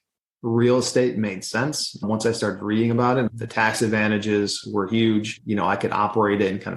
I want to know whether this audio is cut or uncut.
cut